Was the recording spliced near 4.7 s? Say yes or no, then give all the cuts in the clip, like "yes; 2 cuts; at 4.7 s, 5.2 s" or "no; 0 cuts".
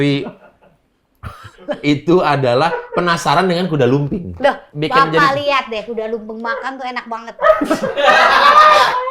yes; 1 cut; at 4.7 s